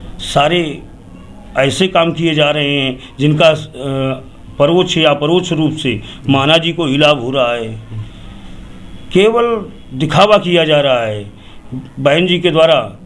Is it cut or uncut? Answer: uncut